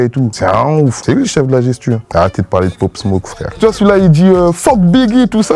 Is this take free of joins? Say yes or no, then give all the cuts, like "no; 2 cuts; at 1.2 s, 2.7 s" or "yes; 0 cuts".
no; 1 cut; at 2.0 s